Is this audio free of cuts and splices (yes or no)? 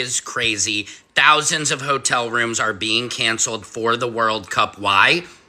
yes